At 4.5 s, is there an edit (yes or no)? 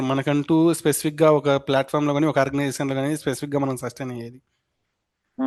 no